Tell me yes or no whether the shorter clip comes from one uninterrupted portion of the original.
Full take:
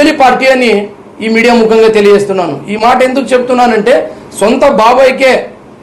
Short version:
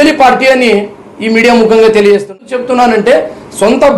no